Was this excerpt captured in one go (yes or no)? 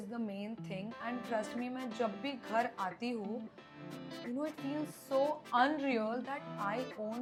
yes